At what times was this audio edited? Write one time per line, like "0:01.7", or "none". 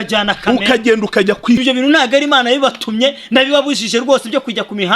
0:01.6